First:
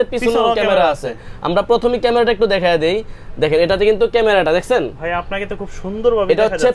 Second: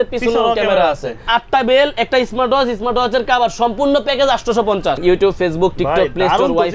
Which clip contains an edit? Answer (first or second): second